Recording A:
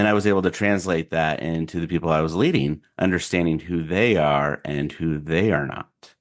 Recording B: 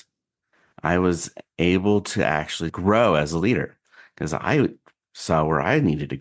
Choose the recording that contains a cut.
B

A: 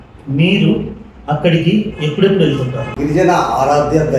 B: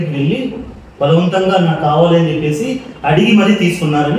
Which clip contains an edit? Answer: A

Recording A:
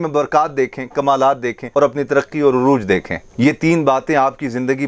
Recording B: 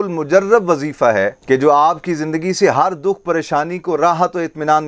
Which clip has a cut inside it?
A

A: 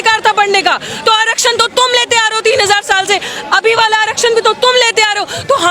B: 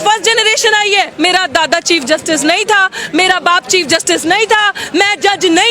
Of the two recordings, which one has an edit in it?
B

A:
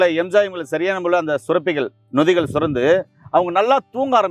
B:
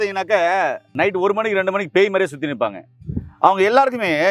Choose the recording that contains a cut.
B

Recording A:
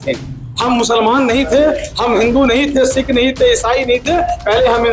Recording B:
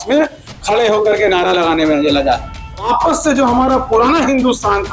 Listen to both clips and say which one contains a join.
B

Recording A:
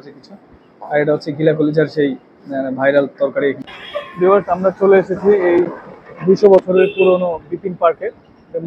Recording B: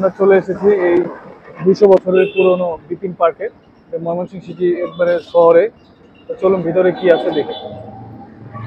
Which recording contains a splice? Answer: A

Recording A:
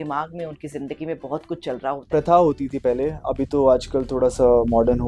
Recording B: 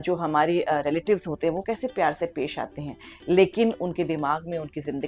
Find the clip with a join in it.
A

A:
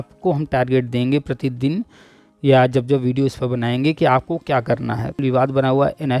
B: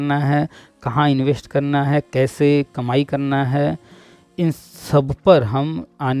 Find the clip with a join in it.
A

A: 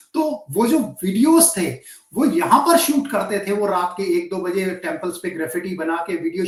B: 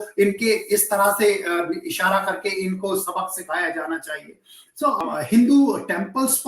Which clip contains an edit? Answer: B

